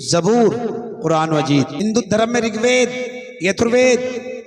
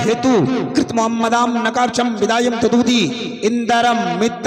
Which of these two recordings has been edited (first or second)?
first